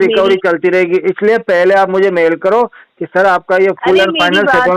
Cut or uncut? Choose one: uncut